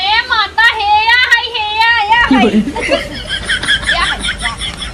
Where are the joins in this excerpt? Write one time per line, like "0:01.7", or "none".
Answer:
none